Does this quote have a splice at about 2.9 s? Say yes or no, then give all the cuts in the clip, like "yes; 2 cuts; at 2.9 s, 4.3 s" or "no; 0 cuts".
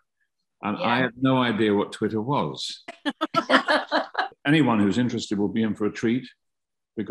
no; 1 cut; at 4.3 s